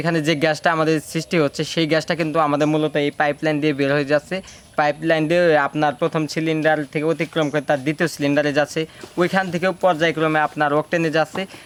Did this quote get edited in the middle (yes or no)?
no